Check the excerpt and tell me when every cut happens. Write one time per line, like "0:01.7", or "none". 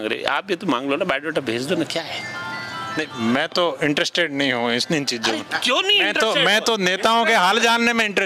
none